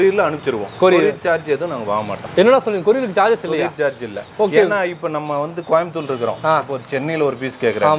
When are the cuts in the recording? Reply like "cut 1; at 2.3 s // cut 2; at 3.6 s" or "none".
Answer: none